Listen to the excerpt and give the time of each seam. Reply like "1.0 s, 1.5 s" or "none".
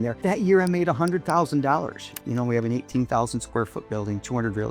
2.2 s